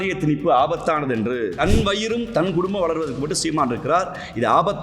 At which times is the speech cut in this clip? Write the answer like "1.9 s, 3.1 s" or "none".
1.6 s